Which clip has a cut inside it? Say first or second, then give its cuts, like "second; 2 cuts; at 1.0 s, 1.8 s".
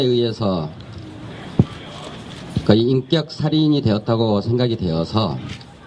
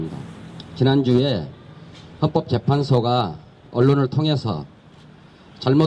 second; 1 cut; at 3.2 s